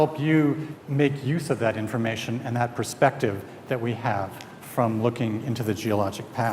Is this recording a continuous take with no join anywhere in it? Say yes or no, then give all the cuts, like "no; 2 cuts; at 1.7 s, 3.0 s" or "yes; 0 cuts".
no; 1 cut; at 2.3 s